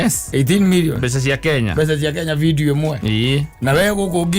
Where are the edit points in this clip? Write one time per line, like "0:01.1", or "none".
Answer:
none